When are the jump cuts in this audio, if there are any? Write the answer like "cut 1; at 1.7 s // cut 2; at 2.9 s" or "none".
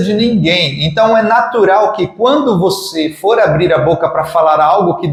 none